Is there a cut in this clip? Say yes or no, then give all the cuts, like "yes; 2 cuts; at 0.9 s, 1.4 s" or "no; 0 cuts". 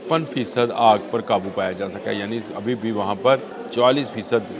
yes; 1 cut; at 3.6 s